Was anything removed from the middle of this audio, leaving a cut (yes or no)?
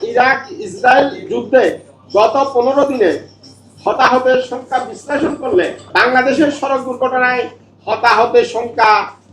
yes